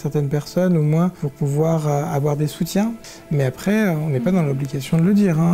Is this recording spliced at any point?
yes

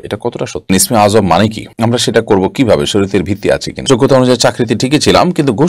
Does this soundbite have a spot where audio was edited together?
yes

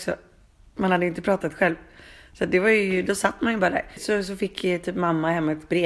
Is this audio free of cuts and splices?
no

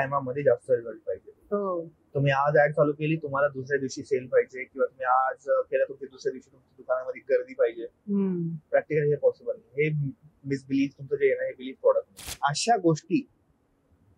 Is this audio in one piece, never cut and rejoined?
no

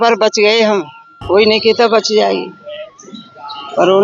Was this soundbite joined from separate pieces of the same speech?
yes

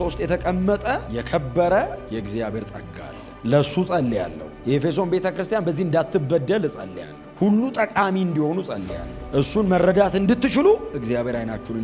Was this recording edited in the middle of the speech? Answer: no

